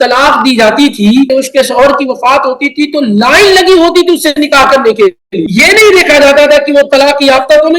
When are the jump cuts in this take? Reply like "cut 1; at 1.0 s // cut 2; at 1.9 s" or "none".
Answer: cut 1; at 1.3 s // cut 2; at 5.3 s